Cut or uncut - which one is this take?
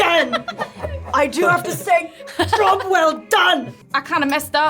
cut